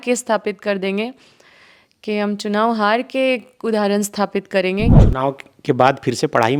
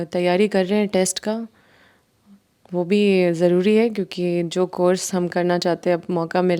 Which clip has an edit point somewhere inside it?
first; 1 cut; at 5.0 s

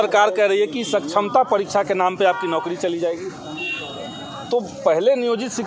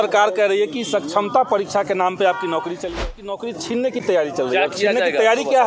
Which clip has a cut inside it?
second; 1 cut; at 3.4 s

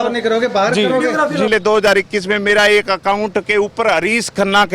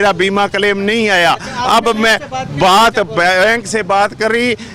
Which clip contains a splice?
first; 1 cut; at 1.5 s

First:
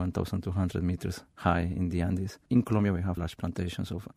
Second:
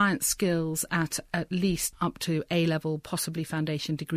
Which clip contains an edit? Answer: first; 2 cuts; at 2.3 s, 3.2 s

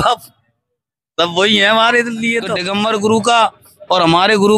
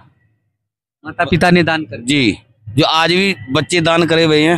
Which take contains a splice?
first; 1 cut; at 2.4 s

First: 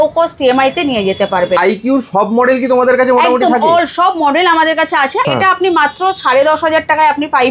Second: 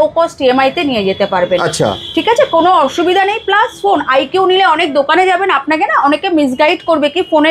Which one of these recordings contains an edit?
first; 2 cuts; at 1.6 s, 5.3 s

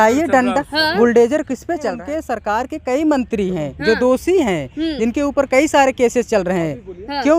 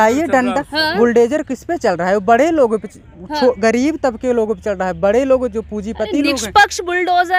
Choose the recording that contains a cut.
first; 1 cut; at 2.0 s

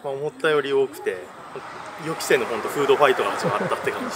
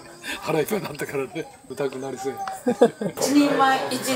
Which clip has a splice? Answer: second; 2 cuts; at 1.6 s, 3.2 s

